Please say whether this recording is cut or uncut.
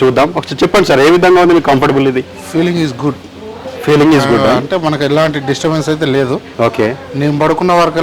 uncut